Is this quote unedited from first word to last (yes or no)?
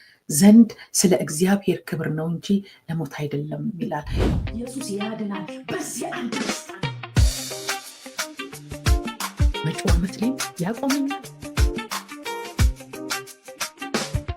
no